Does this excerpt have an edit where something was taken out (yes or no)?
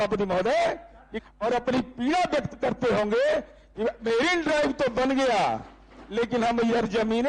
yes